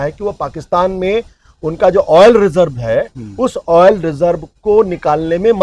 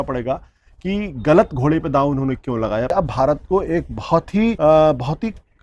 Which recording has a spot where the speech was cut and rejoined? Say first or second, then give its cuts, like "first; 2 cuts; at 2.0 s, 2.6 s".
second; 2 cuts; at 2.9 s, 4.6 s